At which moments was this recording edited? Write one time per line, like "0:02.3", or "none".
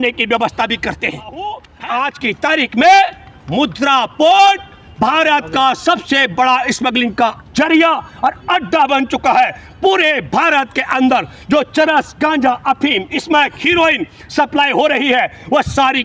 0:01.4